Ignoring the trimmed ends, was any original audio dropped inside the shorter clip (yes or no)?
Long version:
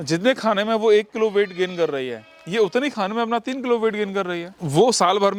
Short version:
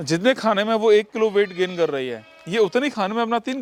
no